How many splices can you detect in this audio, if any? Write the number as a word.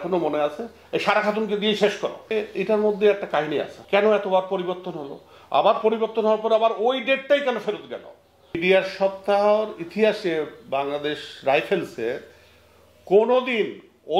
three